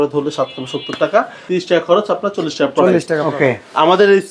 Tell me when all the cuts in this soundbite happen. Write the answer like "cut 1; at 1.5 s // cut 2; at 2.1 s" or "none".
cut 1; at 1.4 s // cut 2; at 3.2 s